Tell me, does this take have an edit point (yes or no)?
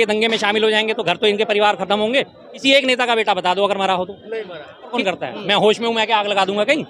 yes